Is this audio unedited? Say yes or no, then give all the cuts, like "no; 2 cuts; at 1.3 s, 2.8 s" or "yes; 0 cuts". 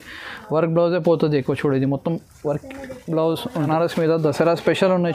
no; 1 cut; at 3.7 s